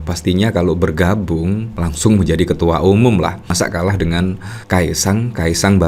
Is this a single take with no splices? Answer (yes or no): yes